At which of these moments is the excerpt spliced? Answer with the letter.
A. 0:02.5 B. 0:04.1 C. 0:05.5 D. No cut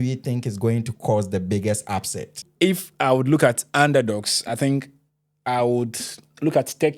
A